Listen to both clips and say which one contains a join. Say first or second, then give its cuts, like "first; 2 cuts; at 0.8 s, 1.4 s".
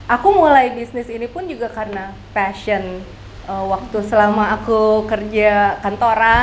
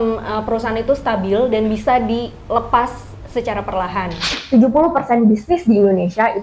second; 1 cut; at 4.3 s